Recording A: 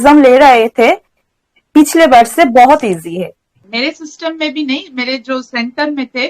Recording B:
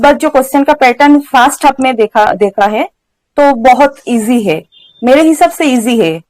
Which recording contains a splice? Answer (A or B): A